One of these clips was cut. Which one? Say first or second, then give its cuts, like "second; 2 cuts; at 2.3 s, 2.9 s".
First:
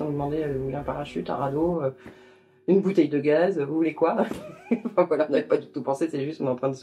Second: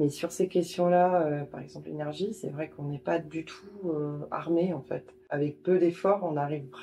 second; 1 cut; at 5.2 s